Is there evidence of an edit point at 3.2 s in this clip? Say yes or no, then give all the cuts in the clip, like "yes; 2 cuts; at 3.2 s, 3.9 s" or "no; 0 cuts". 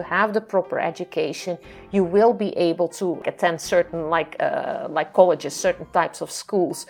yes; 1 cut; at 3.2 s